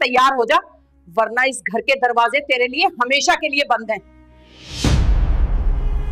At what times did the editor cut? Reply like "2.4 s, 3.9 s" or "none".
none